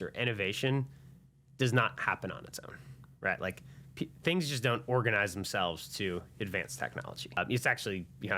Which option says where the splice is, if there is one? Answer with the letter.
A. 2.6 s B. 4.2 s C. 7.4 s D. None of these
C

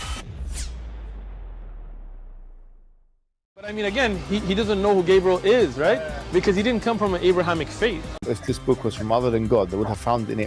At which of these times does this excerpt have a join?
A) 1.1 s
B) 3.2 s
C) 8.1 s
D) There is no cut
C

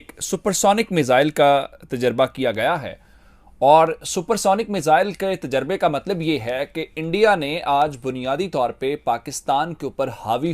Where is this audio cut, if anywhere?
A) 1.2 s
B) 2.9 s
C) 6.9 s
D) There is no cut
D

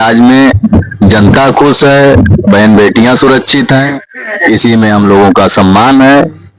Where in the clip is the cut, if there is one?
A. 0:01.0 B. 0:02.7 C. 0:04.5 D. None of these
D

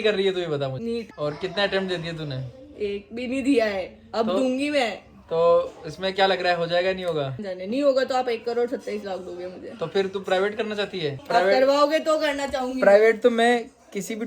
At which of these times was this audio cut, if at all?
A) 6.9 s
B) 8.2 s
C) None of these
C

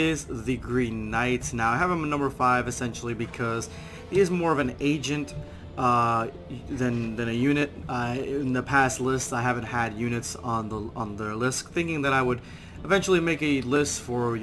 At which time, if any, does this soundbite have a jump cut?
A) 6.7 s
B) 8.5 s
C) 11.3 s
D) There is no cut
A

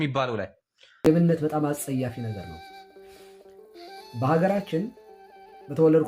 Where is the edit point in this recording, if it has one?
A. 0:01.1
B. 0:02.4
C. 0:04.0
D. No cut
A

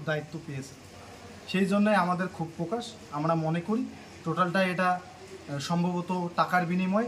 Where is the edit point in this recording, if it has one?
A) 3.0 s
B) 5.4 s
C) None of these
C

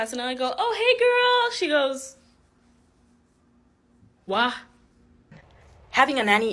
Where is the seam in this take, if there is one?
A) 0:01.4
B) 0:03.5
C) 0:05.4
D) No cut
C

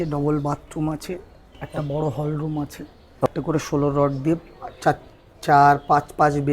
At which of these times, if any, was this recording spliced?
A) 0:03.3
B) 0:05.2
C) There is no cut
A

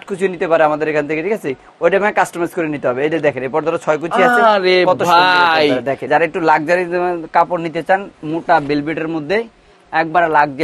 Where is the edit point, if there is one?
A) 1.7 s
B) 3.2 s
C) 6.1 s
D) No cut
C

